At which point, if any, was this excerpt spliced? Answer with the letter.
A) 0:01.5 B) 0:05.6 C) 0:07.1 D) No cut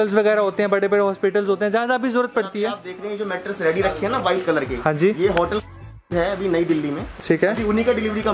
C